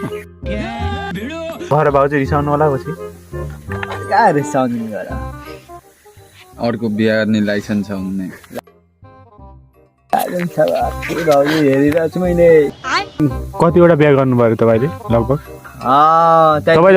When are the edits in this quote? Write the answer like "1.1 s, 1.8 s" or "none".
1.1 s